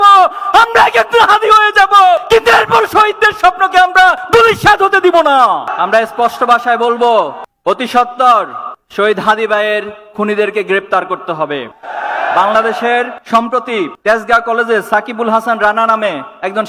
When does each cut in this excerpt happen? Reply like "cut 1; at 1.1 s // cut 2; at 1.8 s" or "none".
none